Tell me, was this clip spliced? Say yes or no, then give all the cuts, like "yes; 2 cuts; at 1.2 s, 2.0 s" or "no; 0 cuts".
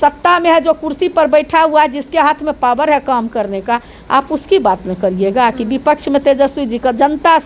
no; 0 cuts